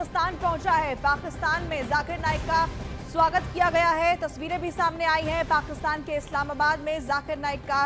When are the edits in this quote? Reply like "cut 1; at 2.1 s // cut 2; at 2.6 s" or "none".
none